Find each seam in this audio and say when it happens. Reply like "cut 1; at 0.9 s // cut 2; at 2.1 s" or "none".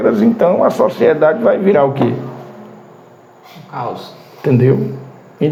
none